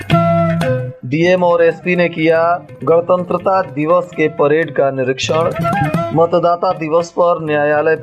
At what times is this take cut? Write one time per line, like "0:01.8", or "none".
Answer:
0:00.9